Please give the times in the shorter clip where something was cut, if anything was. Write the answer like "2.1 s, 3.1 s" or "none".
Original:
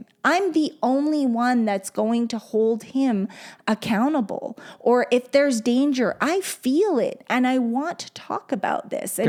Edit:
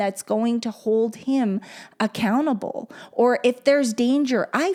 none